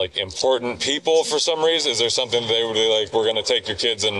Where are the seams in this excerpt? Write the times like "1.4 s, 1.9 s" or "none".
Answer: none

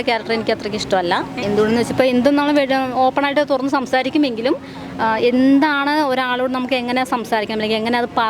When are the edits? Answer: 1.3 s

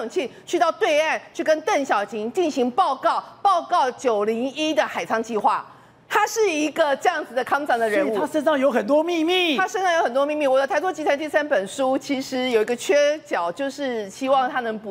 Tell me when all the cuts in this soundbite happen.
none

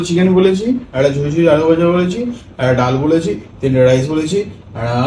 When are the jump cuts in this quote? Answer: none

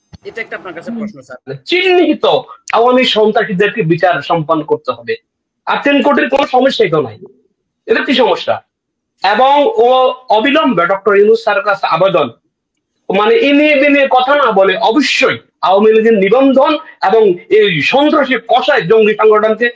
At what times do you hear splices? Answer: 1.6 s

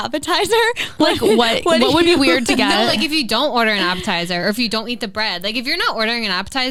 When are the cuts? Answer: none

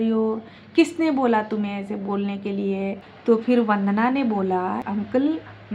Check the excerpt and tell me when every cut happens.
3.1 s, 4.8 s

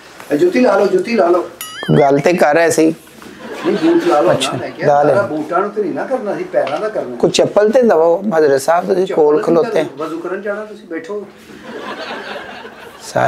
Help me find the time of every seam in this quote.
none

